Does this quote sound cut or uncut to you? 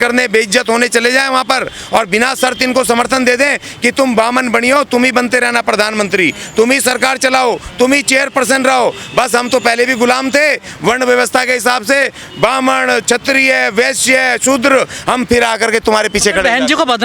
uncut